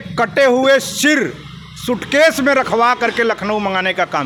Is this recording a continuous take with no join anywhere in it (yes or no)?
yes